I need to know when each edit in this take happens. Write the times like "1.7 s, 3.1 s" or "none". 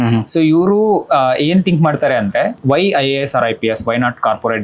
2.6 s